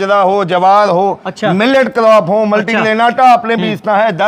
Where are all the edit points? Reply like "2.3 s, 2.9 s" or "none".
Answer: none